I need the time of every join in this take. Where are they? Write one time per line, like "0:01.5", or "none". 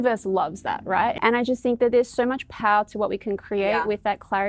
0:01.1